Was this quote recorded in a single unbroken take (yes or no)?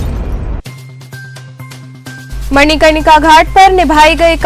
yes